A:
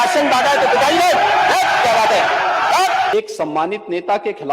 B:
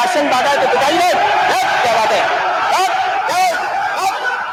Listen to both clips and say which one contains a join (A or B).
A